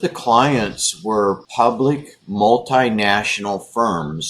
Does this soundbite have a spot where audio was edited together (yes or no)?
yes